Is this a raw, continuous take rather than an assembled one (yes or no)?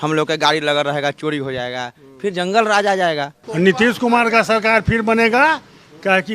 no